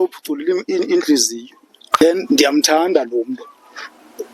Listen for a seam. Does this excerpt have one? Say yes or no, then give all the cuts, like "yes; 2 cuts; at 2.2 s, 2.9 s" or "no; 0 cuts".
yes; 1 cut; at 1.9 s